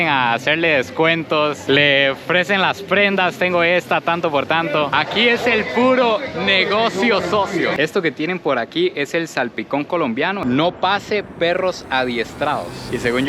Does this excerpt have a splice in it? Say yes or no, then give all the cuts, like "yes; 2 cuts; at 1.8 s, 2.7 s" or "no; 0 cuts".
yes; 2 cuts; at 7.7 s, 10.4 s